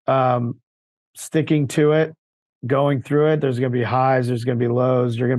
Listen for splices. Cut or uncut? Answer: uncut